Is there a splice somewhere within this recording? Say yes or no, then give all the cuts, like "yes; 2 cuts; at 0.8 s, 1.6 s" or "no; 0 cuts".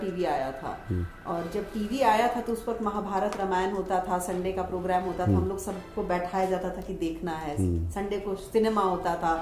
no; 0 cuts